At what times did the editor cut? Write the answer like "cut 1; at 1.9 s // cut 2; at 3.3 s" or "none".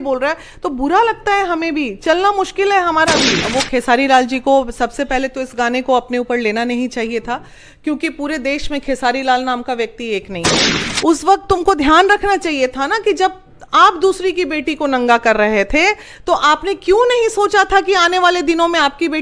cut 1; at 3.4 s // cut 2; at 10.7 s